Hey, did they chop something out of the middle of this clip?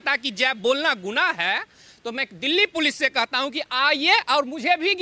no; 0 cuts

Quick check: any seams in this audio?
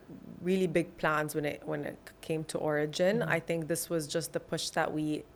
no; 0 cuts

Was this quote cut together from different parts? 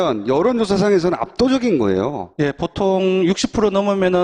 yes; 1 cut; at 2.0 s

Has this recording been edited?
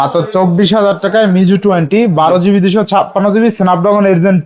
no; 0 cuts

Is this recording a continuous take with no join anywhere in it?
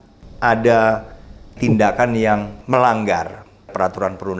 no; 2 cuts; at 1.6 s, 2.5 s

